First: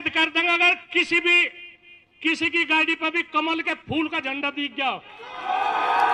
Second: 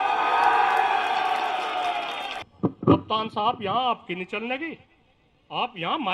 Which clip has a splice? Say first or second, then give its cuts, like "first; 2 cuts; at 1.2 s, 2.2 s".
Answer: second; 1 cut; at 2.4 s